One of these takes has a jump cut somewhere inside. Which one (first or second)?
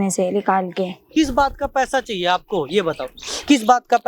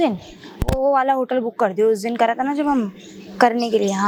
first